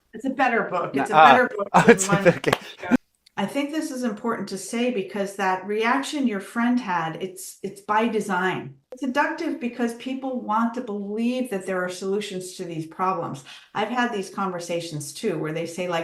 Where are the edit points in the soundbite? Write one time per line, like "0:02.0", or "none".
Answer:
0:03.1
0:08.8